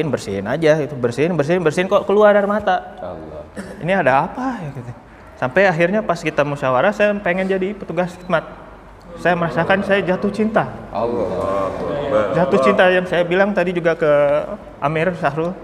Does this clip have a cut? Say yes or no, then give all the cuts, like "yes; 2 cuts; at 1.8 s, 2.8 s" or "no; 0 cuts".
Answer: no; 0 cuts